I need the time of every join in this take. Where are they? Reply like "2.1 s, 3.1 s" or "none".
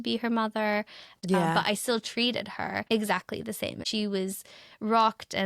1.0 s, 2.8 s, 3.9 s